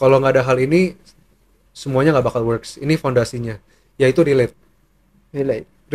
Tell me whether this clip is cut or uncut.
uncut